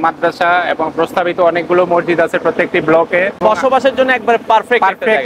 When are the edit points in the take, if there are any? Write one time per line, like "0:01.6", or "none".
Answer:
0:03.4

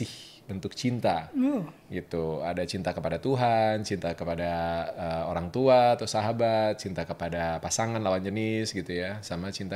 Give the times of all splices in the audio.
none

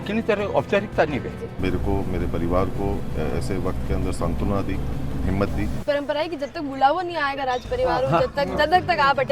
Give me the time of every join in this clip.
0:01.6
0:05.8

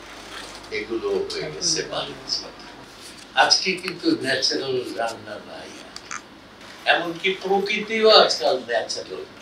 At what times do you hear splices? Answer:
0:02.8
0:06.6

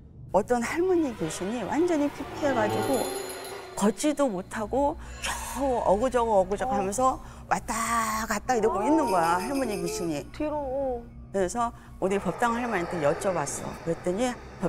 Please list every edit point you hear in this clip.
none

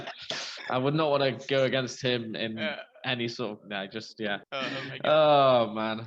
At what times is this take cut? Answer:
0:04.4

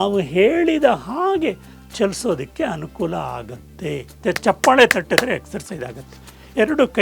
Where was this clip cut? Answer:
0:04.1

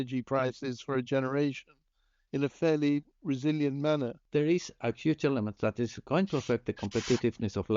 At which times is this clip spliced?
0:04.2

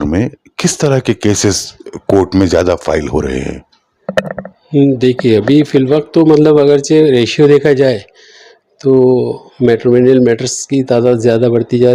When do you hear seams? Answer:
none

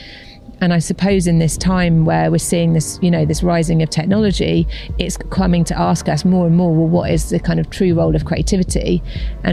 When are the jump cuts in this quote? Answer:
none

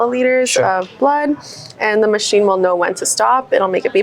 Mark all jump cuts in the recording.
none

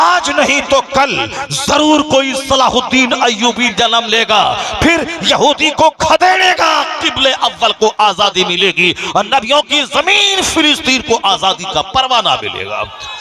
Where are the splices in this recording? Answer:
none

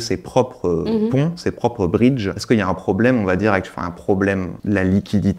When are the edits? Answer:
0:02.3
0:04.5

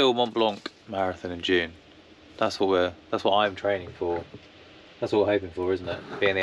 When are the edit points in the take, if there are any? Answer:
none

